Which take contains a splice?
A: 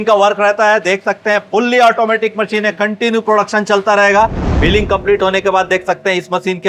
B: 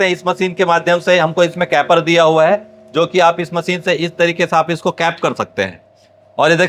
A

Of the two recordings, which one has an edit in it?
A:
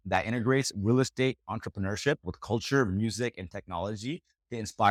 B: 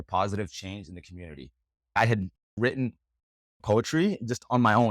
B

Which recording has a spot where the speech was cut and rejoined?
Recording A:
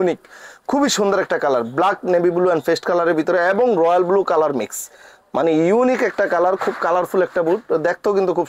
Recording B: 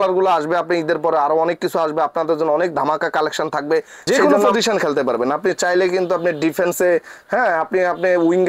B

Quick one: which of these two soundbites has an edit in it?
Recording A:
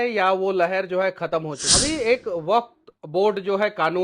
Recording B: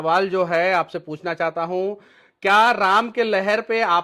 A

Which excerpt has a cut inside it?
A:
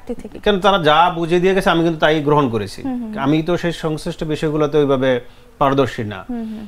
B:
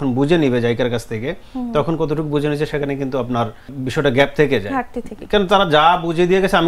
B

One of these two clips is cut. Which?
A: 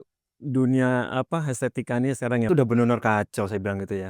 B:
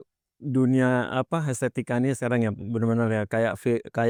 A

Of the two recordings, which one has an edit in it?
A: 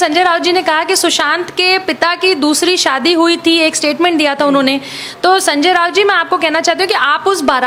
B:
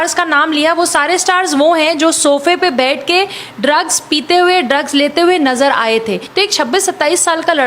B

